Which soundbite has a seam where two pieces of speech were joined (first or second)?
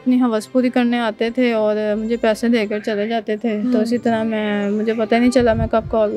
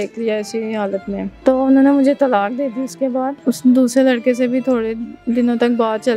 second